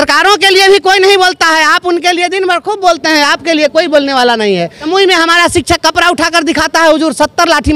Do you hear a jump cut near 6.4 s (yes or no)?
no